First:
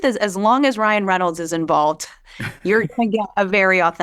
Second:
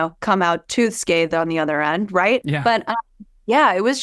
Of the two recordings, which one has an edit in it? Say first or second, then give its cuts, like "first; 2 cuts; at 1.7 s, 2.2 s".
second; 1 cut; at 2.5 s